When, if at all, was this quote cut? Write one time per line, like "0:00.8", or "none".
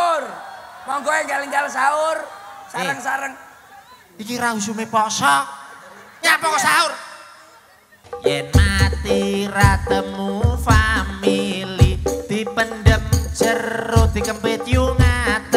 0:08.0